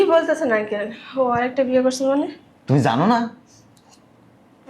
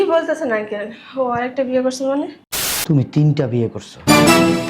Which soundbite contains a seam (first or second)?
second